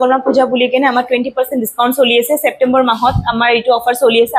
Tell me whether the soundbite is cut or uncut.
uncut